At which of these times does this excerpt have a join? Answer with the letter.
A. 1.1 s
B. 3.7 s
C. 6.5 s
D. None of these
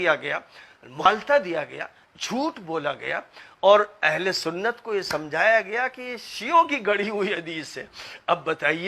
A